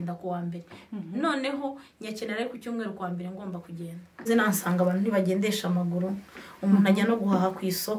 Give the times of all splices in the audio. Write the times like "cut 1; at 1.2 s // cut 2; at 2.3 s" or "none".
cut 1; at 4.3 s